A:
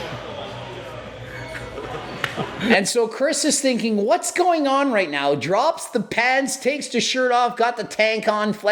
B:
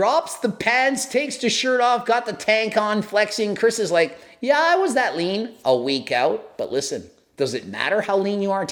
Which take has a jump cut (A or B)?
A